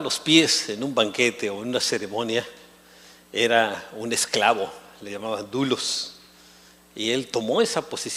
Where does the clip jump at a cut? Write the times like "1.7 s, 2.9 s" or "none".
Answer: none